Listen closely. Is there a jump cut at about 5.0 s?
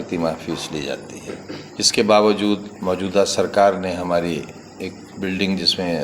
no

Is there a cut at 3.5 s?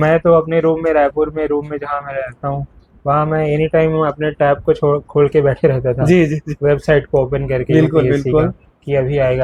no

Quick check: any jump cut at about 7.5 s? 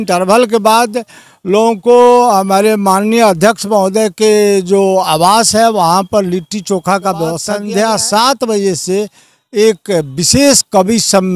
yes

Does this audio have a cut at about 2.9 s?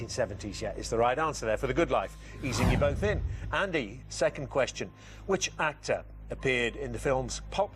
no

